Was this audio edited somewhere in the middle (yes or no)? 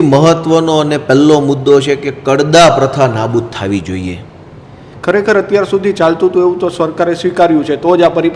yes